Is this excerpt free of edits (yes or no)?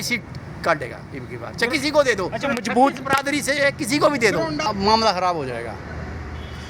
no